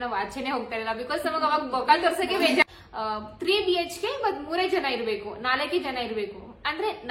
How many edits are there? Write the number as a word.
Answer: one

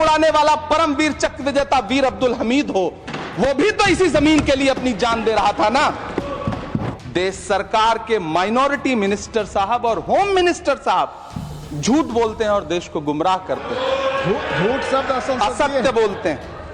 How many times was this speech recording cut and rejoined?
one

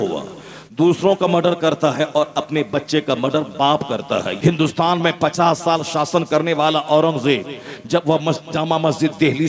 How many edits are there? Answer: one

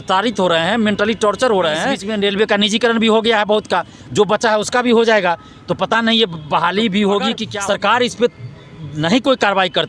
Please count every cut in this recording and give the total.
two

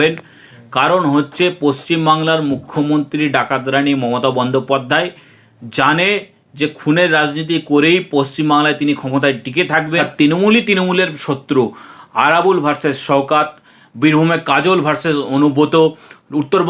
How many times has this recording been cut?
one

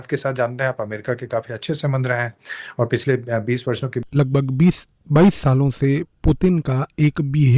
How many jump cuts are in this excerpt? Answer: one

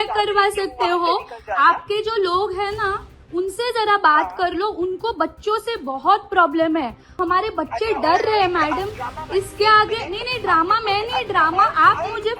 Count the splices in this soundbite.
one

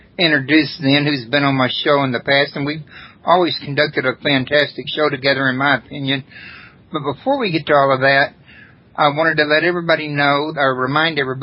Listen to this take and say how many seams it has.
one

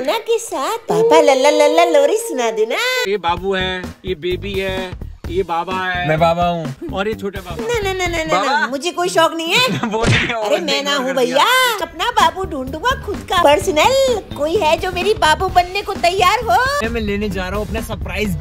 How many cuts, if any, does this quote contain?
four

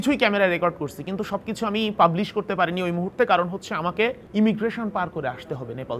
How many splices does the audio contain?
one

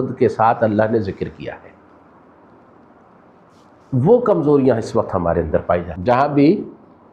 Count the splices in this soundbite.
one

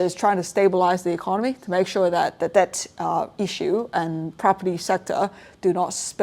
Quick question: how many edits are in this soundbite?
one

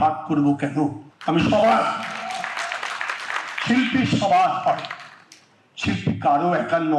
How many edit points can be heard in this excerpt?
one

